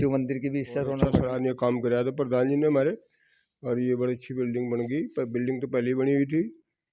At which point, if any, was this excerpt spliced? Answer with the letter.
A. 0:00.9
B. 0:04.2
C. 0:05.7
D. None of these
A